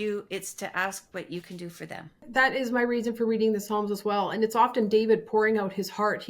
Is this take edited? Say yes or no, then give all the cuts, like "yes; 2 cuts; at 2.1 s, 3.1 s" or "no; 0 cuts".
yes; 1 cut; at 2.3 s